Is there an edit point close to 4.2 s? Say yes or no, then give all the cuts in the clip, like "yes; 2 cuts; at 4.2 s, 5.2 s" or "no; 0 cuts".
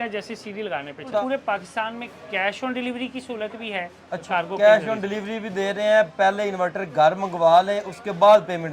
yes; 2 cuts; at 1.2 s, 4.2 s